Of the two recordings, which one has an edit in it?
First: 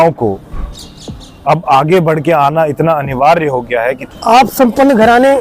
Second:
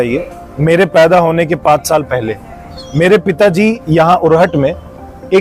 first; 1 cut; at 4.1 s

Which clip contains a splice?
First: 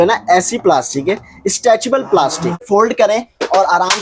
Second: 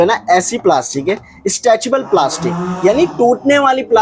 first; 1 cut; at 2.6 s

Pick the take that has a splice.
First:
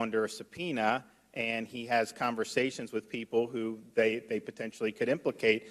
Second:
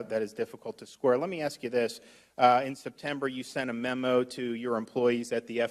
first; 1 cut; at 3.5 s

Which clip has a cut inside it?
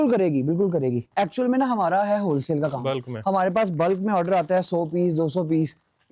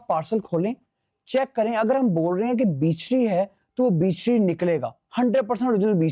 first; 1 cut; at 1.0 s

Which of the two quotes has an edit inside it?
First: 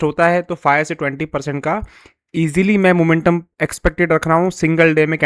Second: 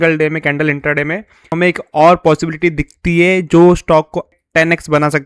second; 2 cuts; at 1.5 s, 4.3 s

